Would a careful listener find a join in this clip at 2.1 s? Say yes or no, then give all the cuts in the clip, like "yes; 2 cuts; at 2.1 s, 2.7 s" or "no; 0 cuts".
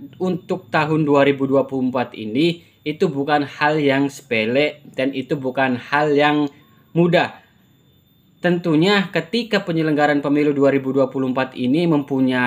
no; 0 cuts